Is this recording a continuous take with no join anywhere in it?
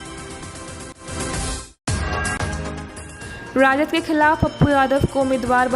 no; 2 cuts; at 1.0 s, 2.7 s

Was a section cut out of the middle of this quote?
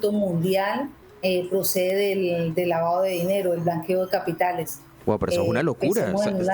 yes; 1 cut; at 1.0 s

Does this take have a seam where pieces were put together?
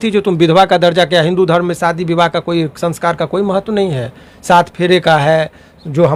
no; 0 cuts

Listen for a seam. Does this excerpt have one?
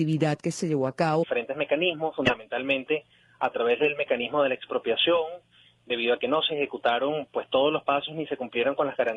no; 0 cuts

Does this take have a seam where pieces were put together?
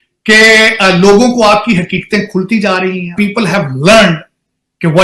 yes; 1 cut; at 3.1 s

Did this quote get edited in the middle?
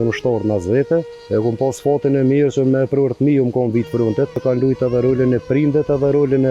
yes; 2 cuts; at 1.2 s, 4.4 s

